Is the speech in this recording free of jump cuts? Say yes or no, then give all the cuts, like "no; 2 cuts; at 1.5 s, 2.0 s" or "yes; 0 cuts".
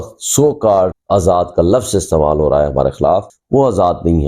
no; 2 cuts; at 1.0 s, 3.4 s